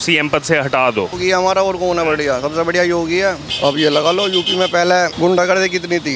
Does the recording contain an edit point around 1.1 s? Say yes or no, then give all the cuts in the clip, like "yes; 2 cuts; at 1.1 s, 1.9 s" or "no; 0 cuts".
yes; 3 cuts; at 1.1 s, 3.5 s, 5.1 s